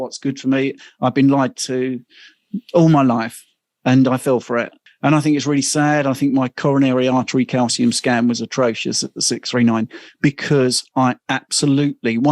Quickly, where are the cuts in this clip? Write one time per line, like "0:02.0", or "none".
0:04.7